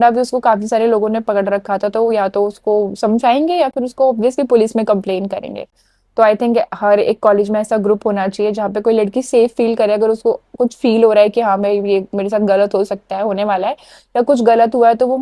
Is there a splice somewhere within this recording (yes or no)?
no